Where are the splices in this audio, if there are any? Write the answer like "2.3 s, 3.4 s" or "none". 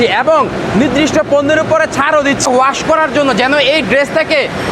2.5 s